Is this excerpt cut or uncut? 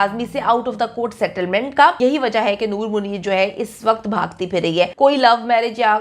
cut